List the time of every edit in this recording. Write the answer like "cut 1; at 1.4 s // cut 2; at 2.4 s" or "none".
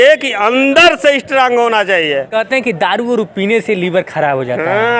cut 1; at 2.3 s